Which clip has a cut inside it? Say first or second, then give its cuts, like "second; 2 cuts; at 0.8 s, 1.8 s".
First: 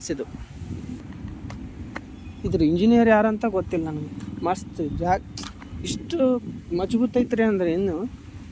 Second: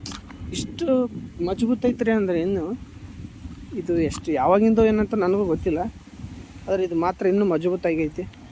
first; 1 cut; at 1.0 s